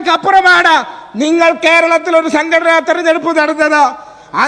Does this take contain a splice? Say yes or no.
no